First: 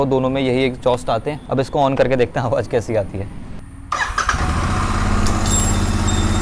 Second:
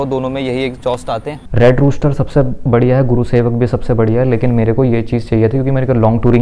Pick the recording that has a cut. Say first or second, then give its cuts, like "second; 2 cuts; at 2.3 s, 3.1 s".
second; 1 cut; at 1.3 s